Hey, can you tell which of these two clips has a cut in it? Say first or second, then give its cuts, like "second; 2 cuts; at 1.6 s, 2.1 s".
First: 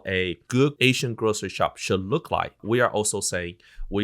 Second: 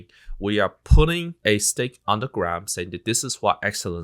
first; 1 cut; at 2.6 s